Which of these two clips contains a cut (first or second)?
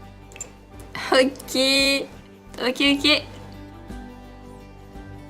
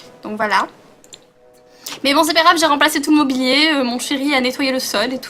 first